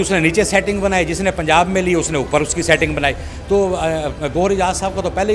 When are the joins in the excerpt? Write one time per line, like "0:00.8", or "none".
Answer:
none